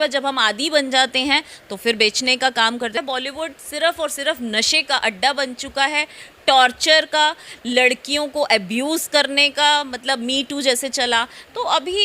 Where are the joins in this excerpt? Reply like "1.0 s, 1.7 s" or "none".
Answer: 3.0 s